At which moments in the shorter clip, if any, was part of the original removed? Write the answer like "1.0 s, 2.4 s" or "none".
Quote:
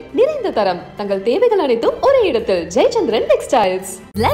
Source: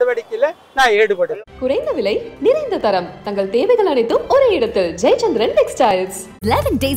none